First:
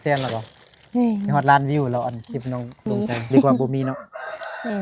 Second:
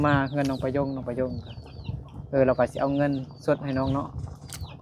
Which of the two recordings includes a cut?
first; 1 cut; at 2.9 s

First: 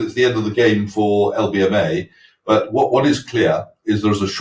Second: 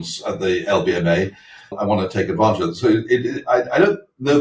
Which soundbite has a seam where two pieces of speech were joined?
second; 1 cut; at 1.8 s

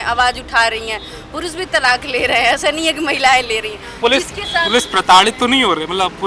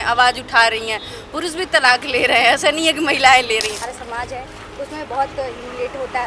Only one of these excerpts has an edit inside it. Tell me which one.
second; 1 cut; at 3.8 s

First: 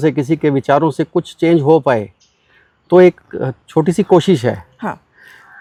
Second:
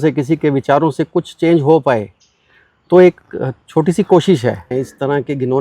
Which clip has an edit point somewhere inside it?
second; 1 cut; at 4.7 s

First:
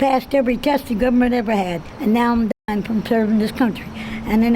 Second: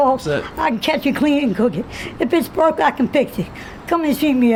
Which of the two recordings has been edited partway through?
first; 1 cut; at 1.8 s

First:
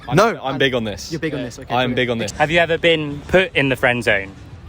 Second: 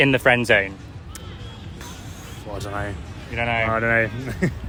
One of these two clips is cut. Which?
first; 1 cut; at 2.3 s

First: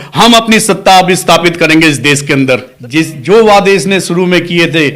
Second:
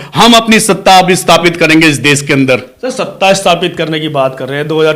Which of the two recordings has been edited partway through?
first; 1 cut; at 2.7 s

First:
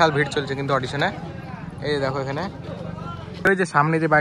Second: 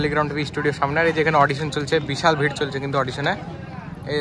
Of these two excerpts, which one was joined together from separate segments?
first; 1 cut; at 3.3 s

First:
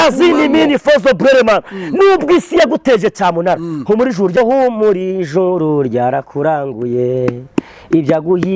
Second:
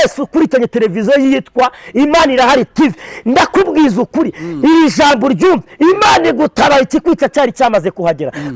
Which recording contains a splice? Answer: first; 1 cut; at 4.4 s

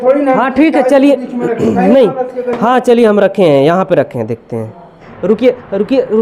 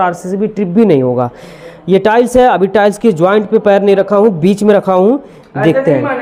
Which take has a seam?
first; 1 cut; at 5.0 s

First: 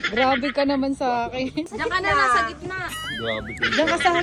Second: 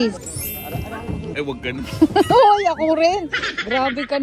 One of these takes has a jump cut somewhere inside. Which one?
first; 1 cut; at 1.7 s

